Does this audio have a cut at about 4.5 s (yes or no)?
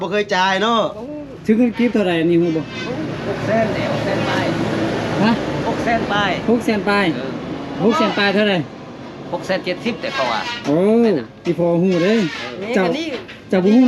no